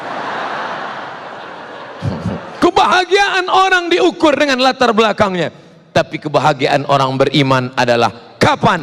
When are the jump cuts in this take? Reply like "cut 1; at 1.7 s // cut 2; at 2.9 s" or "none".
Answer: cut 1; at 2.6 s